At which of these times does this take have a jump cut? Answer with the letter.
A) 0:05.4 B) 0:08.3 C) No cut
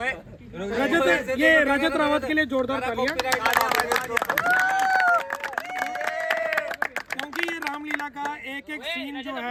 C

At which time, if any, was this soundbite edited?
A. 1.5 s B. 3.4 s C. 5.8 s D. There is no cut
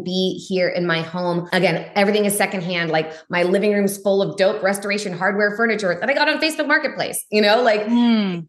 A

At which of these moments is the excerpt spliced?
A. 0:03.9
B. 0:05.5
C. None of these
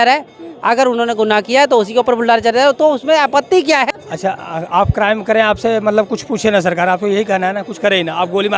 A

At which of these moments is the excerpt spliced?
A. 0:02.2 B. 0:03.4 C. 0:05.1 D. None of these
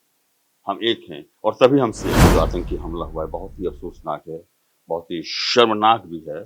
A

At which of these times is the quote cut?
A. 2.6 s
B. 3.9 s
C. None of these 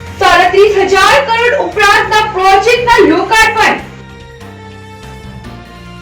B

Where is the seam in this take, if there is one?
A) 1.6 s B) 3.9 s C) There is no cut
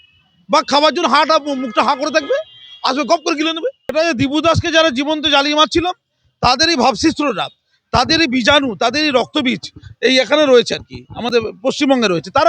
B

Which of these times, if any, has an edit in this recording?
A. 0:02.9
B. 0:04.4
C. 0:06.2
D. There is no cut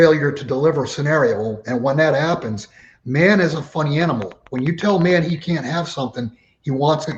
D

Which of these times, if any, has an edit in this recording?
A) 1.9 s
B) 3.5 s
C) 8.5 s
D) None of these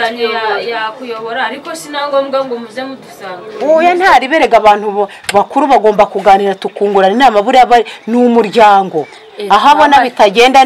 B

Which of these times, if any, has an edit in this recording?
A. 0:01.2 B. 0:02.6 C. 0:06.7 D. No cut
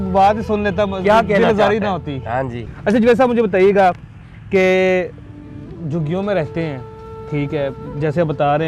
D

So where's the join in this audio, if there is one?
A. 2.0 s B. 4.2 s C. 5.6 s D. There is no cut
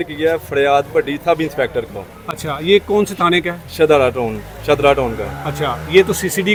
D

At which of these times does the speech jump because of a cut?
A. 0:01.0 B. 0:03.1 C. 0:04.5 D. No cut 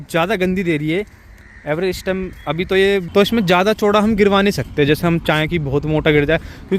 B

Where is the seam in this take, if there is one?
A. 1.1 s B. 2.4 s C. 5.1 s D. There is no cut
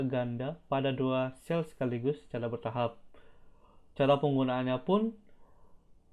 D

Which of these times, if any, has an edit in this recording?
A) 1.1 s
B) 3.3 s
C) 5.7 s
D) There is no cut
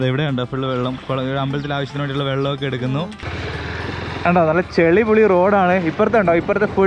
B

